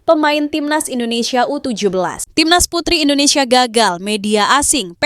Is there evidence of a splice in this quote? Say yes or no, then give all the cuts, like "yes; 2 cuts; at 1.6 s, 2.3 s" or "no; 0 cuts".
yes; 1 cut; at 2.2 s